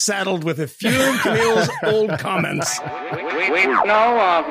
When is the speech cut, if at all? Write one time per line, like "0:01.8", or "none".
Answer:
0:02.7